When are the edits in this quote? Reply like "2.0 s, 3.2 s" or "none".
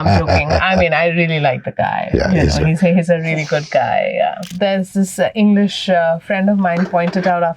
4.5 s